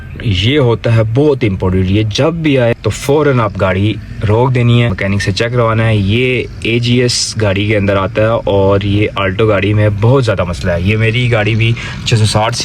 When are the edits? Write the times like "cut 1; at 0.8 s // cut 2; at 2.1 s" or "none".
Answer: cut 1; at 2.7 s // cut 2; at 5.0 s